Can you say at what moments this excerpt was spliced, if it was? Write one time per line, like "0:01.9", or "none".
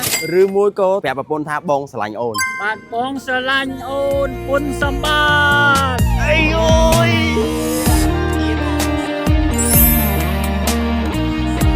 0:02.4